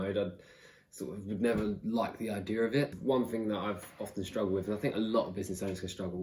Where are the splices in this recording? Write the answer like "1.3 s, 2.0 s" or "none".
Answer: 2.9 s